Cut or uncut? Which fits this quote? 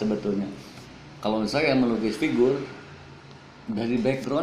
uncut